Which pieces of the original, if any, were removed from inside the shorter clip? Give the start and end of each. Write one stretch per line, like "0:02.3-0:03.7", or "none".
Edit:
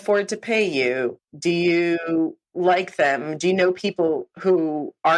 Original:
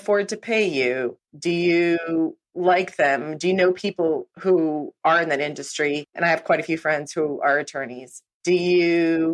none